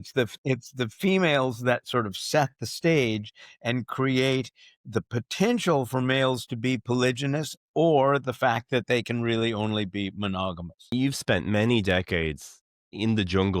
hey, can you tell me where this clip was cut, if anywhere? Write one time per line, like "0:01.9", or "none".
0:10.9